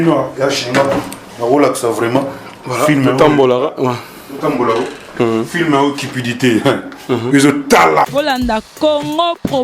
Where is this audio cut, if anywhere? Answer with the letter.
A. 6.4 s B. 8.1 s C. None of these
B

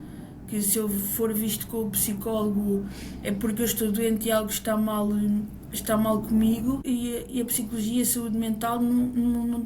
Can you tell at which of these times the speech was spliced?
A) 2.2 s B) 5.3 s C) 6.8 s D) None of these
C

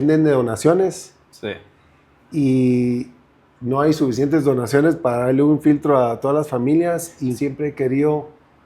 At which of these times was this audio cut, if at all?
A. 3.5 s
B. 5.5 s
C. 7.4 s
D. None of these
C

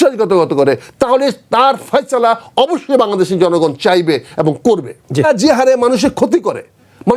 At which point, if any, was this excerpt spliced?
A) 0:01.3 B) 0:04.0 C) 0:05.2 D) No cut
C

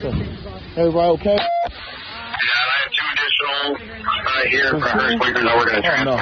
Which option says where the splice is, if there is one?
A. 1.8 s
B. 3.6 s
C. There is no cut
B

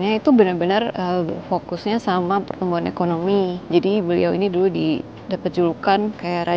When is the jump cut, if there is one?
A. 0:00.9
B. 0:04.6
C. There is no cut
C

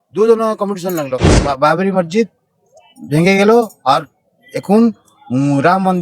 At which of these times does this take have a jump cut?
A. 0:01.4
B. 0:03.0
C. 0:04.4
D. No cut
A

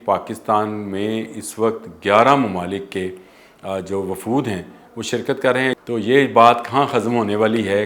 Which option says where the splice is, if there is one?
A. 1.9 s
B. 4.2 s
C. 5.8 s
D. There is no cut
C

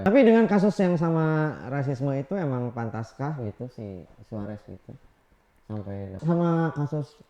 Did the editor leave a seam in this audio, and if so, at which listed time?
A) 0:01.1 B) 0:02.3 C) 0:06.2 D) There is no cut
C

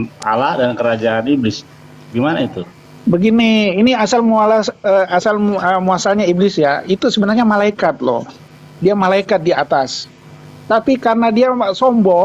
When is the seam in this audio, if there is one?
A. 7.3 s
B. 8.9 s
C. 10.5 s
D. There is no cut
D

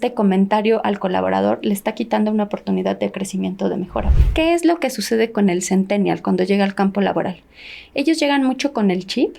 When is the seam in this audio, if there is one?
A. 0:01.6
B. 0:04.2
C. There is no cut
B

